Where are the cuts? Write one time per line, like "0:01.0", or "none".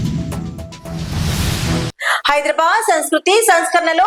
none